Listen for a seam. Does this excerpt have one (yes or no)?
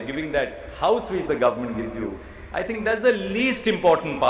no